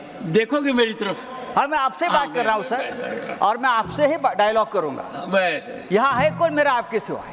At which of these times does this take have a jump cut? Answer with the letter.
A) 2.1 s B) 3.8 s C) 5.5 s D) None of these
D